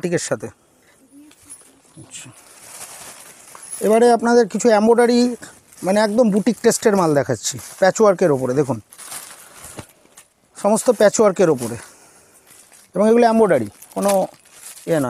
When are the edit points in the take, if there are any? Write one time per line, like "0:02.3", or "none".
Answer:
none